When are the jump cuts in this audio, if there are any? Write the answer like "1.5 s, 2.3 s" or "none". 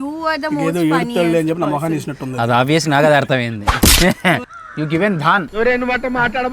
4.6 s